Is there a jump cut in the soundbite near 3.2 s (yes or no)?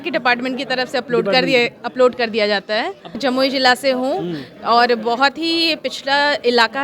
yes